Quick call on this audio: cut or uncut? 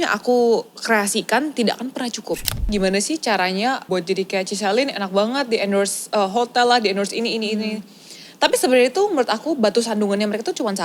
cut